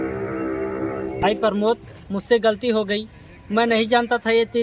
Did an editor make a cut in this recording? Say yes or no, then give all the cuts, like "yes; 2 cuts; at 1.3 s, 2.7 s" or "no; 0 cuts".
yes; 1 cut; at 1.1 s